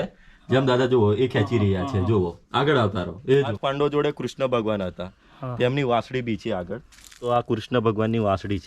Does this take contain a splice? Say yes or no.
yes